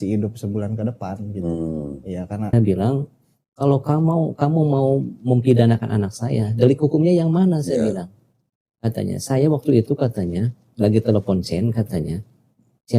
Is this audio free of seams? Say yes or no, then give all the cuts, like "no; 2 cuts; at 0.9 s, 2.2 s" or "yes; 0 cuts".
no; 1 cut; at 2.5 s